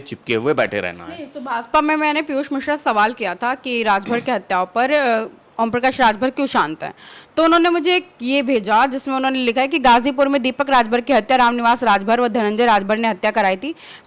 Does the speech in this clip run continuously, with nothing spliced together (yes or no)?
yes